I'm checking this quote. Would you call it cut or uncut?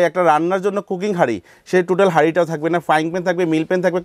uncut